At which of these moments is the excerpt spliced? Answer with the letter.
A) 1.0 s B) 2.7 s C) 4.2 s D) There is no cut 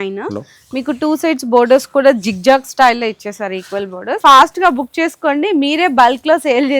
C